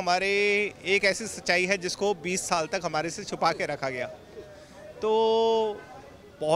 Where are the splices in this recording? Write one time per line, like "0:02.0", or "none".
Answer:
none